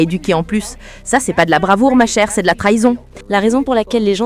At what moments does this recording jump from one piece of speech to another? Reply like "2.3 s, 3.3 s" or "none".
3.1 s

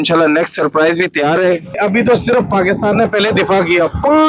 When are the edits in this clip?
1.8 s

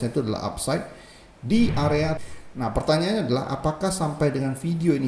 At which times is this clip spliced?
2.2 s

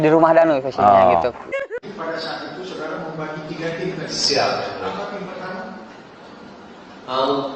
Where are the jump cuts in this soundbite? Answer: 1.5 s

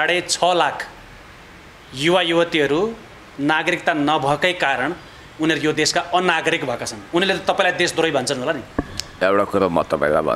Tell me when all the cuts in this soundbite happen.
none

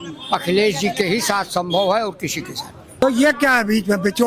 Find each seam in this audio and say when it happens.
3.0 s

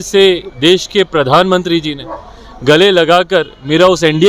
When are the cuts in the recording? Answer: none

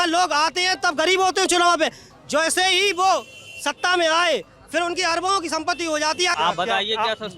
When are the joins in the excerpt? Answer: 6.3 s

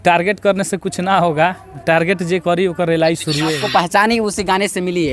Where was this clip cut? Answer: 3.6 s

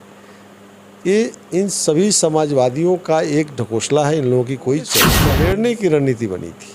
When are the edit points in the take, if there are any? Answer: 5.2 s

